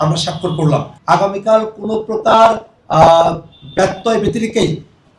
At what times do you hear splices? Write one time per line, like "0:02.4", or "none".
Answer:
0:00.9